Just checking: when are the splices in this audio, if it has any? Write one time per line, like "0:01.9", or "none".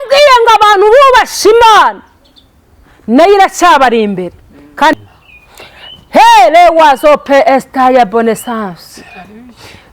0:04.9